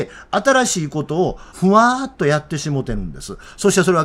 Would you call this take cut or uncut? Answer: cut